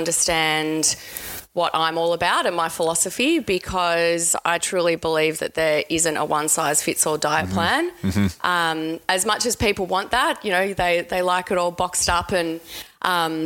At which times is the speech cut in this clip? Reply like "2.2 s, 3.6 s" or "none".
none